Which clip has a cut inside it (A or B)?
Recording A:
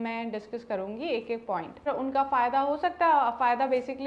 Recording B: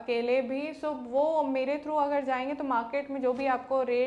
A